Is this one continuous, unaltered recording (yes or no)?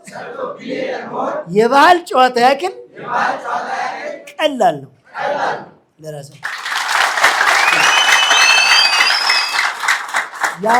yes